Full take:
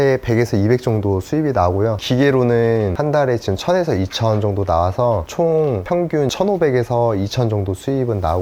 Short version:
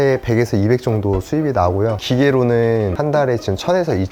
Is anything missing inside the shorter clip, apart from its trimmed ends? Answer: no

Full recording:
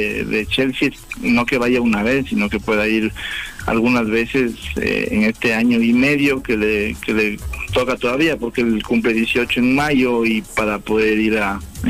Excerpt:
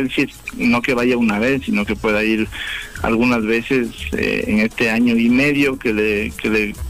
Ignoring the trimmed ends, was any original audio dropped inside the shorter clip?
no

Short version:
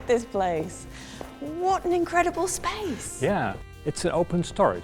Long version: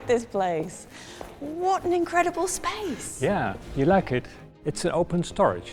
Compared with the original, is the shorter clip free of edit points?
no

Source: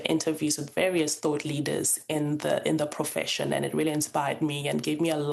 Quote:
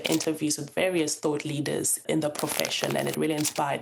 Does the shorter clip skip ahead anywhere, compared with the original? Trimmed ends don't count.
yes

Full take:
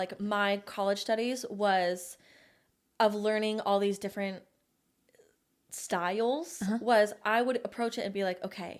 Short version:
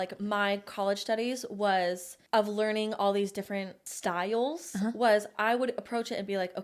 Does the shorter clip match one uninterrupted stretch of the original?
no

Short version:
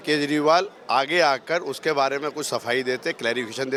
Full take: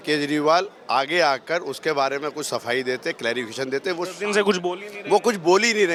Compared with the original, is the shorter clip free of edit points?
yes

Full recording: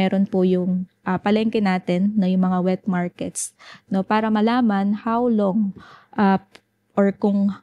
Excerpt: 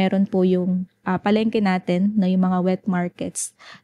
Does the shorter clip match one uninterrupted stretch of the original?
yes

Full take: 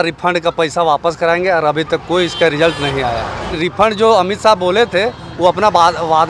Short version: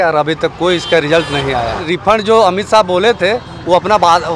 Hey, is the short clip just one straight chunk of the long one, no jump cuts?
no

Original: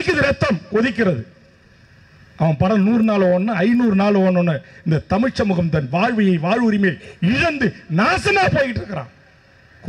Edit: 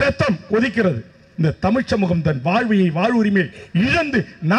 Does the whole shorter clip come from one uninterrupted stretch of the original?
no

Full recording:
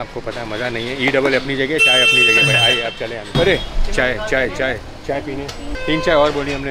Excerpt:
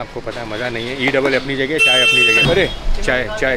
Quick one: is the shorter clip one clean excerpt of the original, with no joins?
no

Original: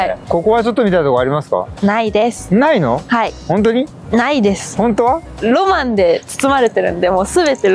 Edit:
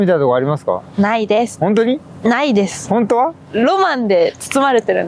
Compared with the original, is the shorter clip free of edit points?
no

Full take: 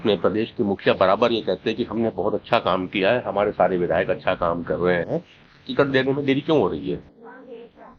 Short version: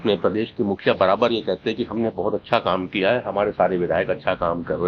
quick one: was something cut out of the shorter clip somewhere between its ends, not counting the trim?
no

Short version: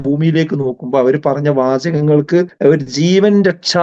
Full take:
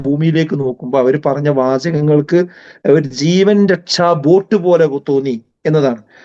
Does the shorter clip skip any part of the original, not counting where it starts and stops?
yes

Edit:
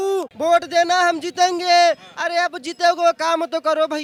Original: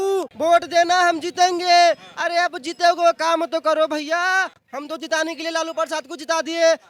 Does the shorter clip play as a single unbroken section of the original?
yes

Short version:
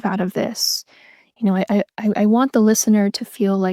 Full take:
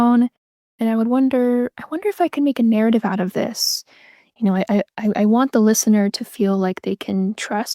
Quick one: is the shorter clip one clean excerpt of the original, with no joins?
yes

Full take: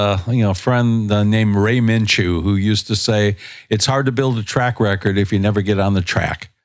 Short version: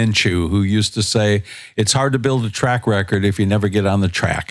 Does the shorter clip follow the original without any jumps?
yes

